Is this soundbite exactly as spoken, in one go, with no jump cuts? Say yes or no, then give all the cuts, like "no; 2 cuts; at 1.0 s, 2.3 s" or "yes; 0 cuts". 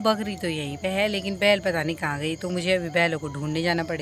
yes; 0 cuts